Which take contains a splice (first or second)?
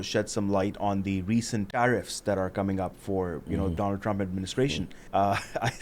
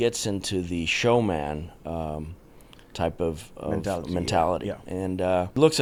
first